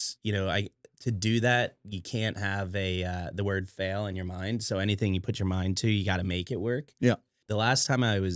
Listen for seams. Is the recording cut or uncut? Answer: cut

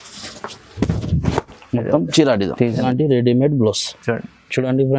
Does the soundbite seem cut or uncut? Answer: cut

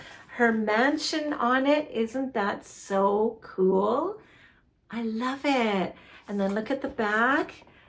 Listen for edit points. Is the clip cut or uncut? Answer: uncut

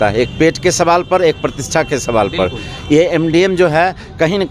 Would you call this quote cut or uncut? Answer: uncut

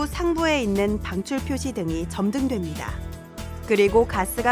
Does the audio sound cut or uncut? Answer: uncut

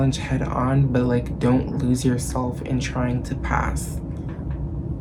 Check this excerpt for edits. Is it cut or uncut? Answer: uncut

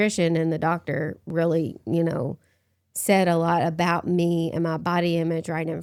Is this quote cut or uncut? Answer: uncut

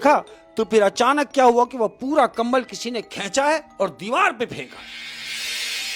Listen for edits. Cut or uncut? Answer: uncut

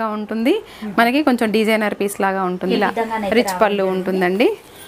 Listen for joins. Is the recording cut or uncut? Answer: cut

